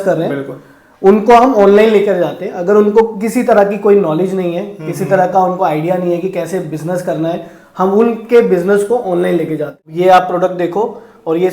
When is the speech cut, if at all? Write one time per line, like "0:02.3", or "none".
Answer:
0:09.8